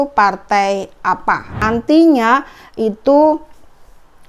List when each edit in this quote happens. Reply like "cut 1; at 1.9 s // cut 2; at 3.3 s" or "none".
cut 1; at 1.6 s